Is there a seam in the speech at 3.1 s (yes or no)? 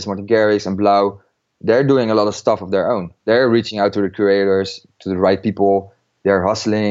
yes